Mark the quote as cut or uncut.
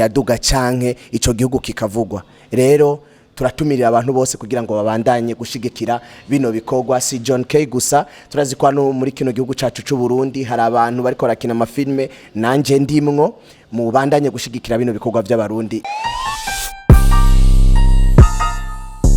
cut